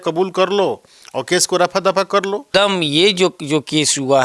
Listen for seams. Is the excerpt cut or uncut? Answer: cut